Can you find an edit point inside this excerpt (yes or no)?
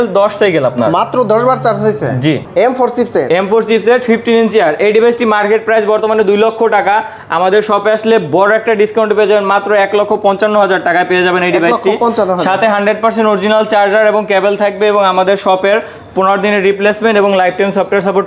no